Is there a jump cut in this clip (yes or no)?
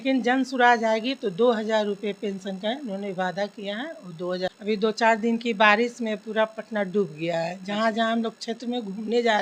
yes